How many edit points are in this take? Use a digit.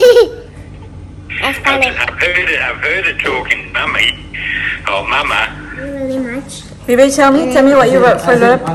0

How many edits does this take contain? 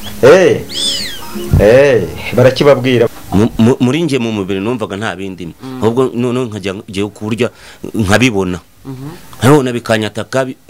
1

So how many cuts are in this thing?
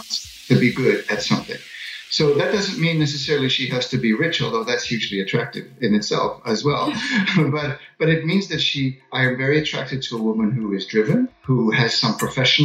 1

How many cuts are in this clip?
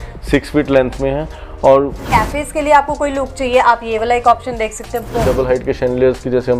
2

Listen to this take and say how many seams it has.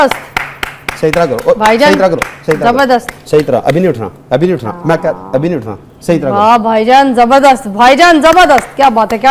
0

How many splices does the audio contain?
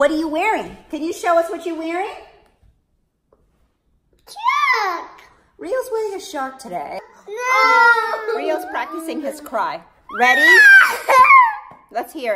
1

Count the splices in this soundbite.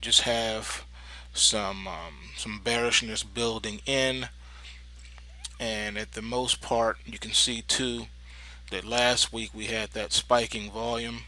1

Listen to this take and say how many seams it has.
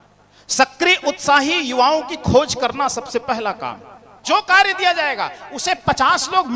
1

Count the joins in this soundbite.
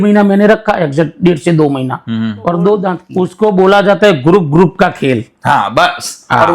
1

